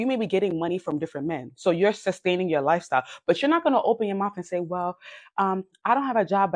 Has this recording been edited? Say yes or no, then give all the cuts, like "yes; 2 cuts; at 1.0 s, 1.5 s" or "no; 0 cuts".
no; 0 cuts